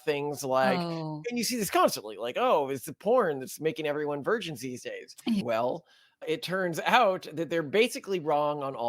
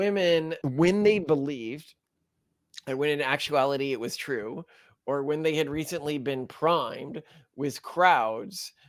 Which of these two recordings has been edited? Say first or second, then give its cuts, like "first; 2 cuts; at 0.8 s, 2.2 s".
first; 1 cut; at 5.4 s